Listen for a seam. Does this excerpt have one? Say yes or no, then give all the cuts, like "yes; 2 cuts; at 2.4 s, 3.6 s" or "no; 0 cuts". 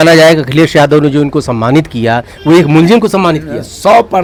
no; 0 cuts